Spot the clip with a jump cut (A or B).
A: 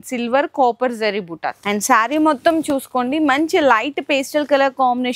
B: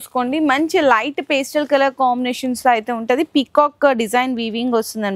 A